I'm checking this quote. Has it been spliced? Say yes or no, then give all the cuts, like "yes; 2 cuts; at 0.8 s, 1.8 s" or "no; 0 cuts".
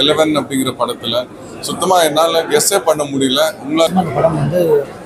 yes; 1 cut; at 3.9 s